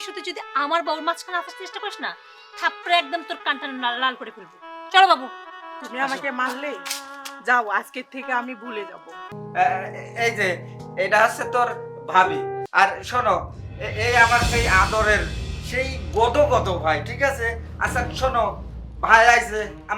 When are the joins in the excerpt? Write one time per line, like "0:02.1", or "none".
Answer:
0:09.4